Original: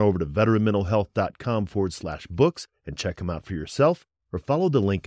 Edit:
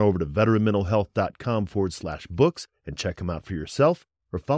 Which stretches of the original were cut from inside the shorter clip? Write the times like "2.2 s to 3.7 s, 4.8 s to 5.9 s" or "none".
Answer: none